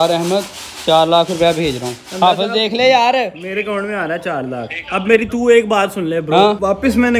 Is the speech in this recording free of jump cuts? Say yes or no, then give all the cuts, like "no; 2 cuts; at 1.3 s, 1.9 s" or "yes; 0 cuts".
yes; 0 cuts